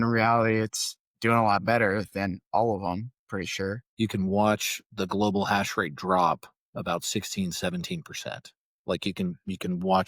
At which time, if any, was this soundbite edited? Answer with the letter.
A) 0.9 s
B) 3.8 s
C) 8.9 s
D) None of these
B